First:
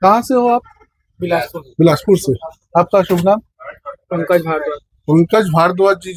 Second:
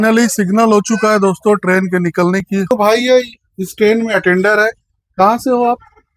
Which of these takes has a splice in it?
second; 1 cut; at 2.7 s

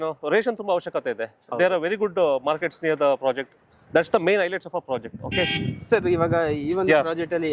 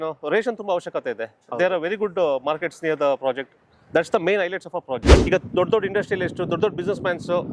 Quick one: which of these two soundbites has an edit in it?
second; 1 cut; at 5.1 s

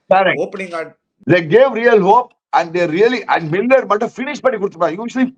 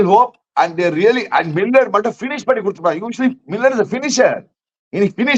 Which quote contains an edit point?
first; 1 cut; at 1.1 s

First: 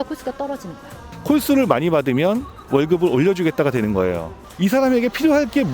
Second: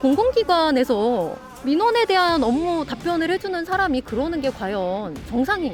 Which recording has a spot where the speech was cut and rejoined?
first; 2 cuts; at 1.1 s, 4.4 s

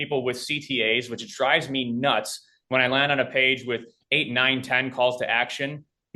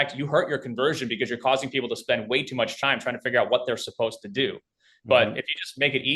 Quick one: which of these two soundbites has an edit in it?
second; 1 cut; at 2.7 s

